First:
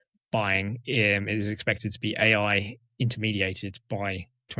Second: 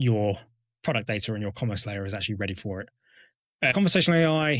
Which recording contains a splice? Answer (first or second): second